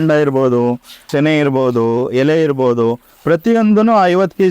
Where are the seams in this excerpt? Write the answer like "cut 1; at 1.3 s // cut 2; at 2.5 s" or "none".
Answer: cut 1; at 1.1 s